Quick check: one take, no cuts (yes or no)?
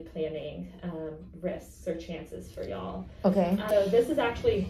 no